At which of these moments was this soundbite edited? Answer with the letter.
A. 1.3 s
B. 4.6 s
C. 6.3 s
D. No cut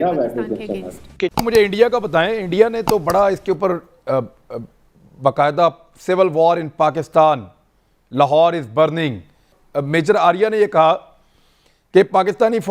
A